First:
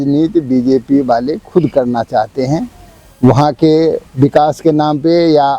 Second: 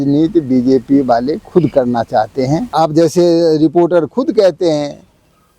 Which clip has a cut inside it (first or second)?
second